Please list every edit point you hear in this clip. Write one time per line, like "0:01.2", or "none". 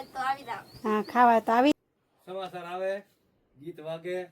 0:01.7